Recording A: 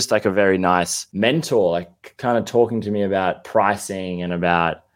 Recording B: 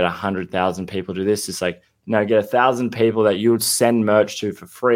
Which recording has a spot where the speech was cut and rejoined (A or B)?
A